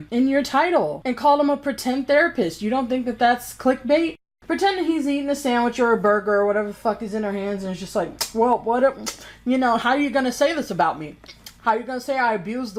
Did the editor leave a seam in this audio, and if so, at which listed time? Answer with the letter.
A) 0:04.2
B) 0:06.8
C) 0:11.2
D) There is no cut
A